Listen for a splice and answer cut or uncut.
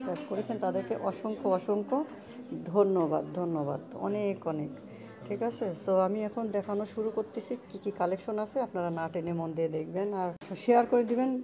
cut